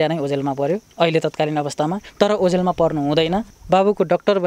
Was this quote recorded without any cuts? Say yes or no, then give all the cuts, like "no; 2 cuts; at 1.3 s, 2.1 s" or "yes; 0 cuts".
no; 2 cuts; at 0.9 s, 3.5 s